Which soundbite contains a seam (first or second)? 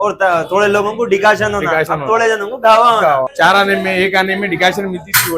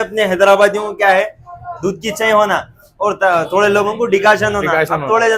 first